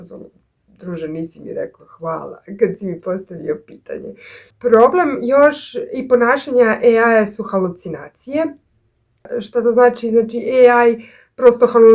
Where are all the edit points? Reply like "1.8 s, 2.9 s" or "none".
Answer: none